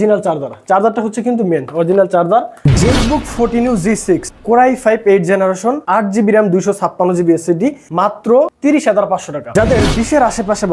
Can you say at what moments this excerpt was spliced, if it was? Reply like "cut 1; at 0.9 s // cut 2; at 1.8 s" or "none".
cut 1; at 2.5 s // cut 2; at 4.3 s // cut 3; at 5.8 s // cut 4; at 7.9 s // cut 5; at 9.4 s